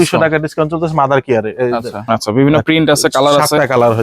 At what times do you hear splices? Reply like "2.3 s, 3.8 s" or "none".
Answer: 1.9 s